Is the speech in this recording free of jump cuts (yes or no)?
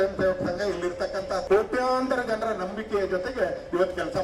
no